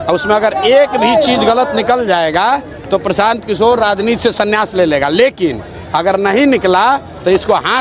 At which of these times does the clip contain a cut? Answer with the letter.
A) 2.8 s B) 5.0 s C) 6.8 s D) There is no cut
D